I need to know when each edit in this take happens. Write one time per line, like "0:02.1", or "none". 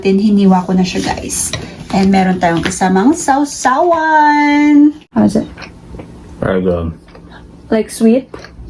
0:05.0